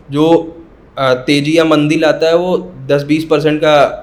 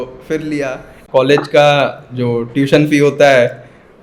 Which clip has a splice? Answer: second; 1 cut; at 1.0 s

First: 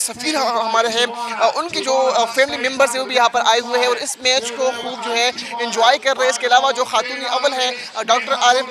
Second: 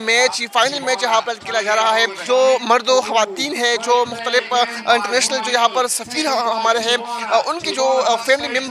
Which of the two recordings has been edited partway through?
second; 1 cut; at 2.2 s

